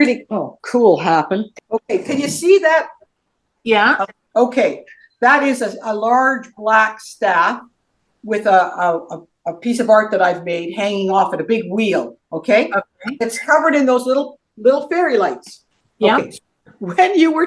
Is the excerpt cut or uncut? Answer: cut